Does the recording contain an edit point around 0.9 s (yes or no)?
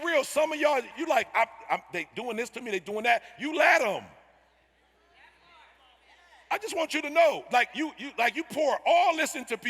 yes